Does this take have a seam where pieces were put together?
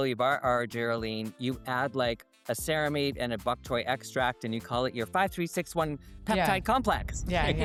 no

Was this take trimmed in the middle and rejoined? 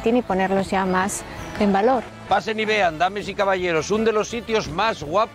yes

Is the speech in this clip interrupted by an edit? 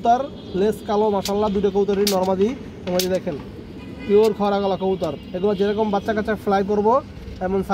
no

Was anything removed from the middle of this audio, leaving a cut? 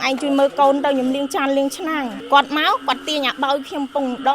yes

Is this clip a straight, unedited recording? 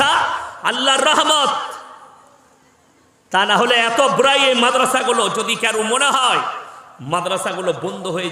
yes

